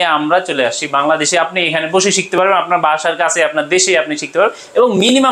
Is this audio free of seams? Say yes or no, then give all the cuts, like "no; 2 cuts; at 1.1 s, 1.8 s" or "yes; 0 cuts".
yes; 0 cuts